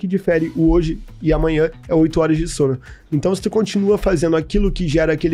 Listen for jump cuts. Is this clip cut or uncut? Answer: uncut